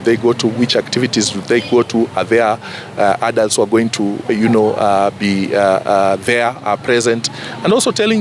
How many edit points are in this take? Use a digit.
0